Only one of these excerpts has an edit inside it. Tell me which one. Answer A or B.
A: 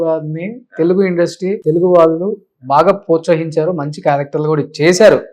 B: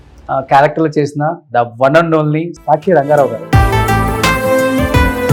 A